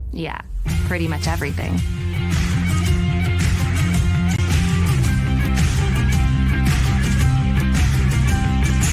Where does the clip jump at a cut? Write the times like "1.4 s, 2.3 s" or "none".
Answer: 6.7 s